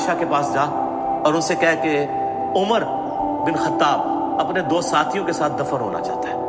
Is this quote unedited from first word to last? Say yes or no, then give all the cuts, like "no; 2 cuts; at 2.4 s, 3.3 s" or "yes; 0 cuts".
yes; 0 cuts